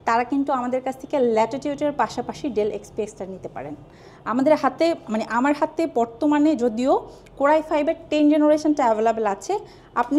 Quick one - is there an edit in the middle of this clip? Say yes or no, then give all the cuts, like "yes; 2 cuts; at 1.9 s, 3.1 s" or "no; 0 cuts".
no; 0 cuts